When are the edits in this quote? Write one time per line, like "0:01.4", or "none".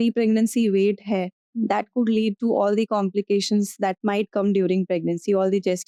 none